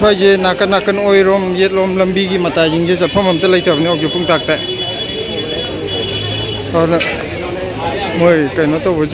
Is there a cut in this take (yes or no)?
no